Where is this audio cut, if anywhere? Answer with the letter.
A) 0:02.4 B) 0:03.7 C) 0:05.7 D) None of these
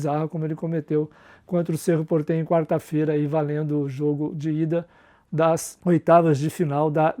C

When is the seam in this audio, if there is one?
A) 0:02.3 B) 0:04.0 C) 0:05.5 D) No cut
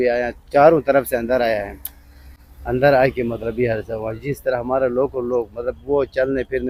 D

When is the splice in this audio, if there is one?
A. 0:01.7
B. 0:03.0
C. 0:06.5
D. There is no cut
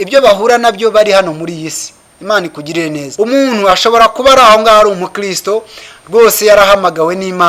B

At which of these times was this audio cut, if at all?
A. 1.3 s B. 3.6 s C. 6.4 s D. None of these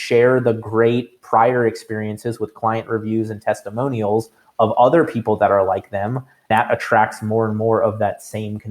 C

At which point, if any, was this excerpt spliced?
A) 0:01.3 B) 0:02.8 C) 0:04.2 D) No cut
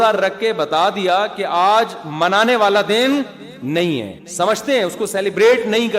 C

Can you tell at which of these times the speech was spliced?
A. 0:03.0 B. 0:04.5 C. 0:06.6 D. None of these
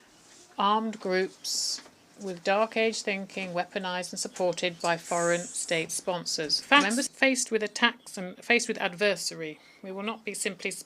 C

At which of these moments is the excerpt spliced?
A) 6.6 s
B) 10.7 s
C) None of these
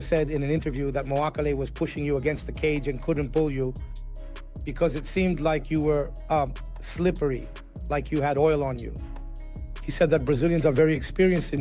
C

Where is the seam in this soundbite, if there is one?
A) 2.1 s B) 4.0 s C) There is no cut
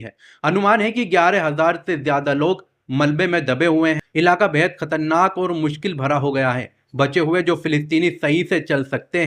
B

